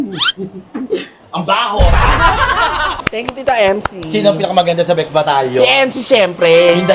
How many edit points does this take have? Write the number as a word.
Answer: one